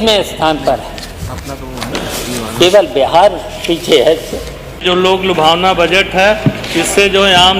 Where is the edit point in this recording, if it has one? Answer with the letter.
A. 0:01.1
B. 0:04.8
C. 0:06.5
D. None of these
B